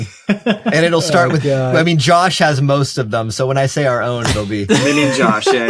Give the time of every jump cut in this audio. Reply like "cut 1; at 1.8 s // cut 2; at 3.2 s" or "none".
none